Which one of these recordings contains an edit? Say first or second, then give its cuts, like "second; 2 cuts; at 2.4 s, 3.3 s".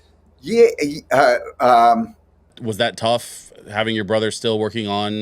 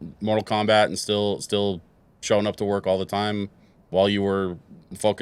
first; 1 cut; at 2.6 s